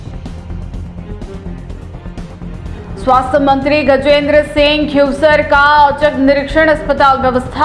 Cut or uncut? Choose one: cut